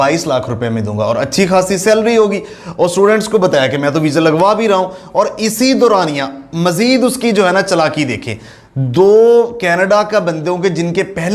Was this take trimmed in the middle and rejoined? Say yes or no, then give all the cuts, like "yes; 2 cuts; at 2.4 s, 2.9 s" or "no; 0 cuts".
no; 0 cuts